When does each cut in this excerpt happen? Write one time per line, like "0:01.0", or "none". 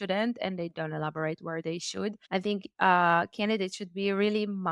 0:02.2